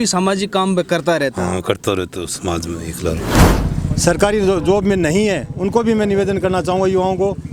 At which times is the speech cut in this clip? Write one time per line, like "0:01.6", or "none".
0:03.4